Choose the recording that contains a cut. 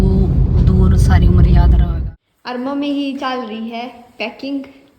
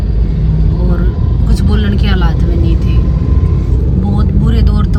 first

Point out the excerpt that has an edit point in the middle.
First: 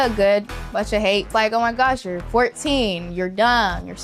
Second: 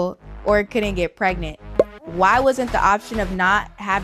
first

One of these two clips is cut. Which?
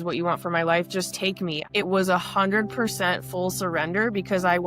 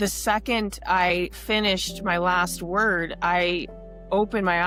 first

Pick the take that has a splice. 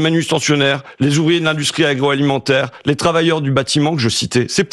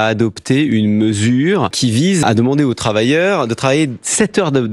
second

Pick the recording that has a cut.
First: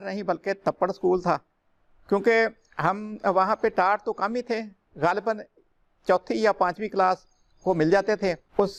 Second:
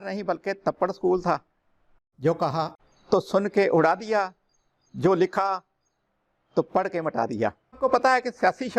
second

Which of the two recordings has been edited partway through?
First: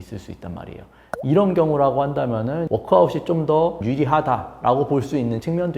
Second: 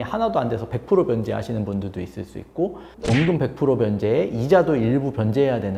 first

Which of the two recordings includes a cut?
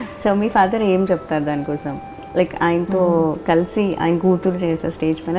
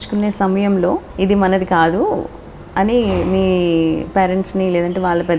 second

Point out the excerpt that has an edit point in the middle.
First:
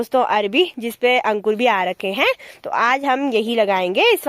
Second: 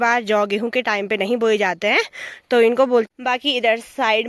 second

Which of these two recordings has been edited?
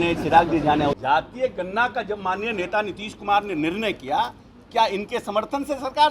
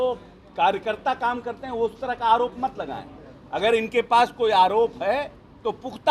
first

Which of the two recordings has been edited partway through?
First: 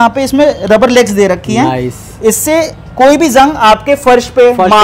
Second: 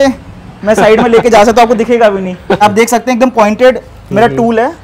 second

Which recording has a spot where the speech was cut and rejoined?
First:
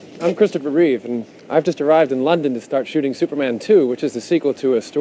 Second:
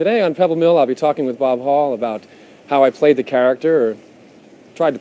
second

